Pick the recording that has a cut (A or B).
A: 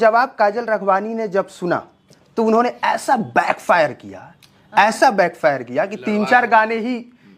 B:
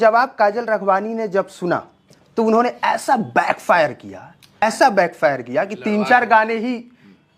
B